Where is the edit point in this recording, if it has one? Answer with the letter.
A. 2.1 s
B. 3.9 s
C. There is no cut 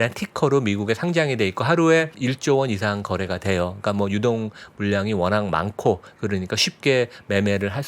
A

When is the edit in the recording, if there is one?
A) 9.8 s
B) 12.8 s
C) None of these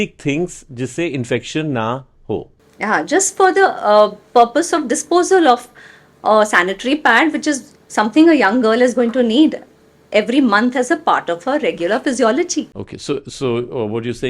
B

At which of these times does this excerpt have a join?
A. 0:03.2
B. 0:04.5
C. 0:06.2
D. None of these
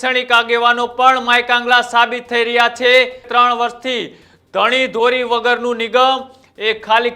A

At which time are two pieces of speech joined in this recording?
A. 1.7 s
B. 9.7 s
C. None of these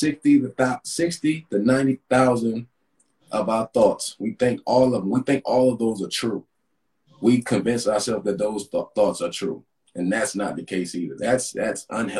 A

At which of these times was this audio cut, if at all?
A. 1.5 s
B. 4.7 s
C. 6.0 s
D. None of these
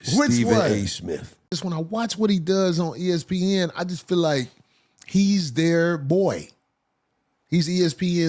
A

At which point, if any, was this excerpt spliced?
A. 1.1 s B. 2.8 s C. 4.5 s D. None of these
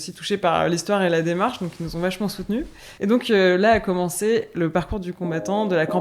B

